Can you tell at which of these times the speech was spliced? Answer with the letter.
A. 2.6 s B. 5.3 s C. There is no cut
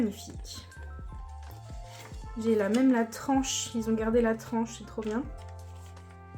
B